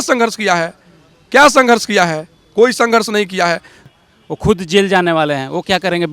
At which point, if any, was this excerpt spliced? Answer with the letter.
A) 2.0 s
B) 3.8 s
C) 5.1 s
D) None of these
B